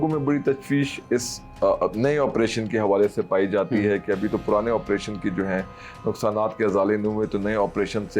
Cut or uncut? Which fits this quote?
uncut